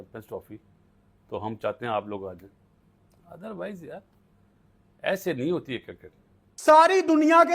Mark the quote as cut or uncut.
cut